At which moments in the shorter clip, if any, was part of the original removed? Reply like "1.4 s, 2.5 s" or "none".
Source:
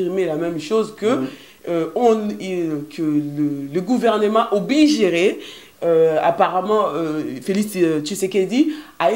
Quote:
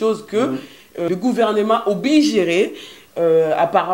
1.1 s